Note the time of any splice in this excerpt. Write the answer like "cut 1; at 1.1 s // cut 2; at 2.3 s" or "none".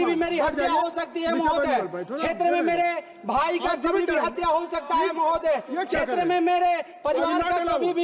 none